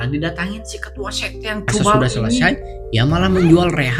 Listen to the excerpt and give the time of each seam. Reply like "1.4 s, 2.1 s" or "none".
2.4 s